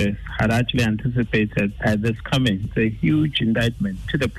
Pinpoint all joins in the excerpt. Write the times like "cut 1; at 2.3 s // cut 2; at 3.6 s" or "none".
cut 1; at 1.8 s